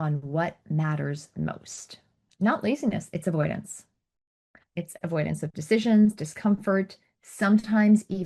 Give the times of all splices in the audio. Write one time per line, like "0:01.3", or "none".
0:02.2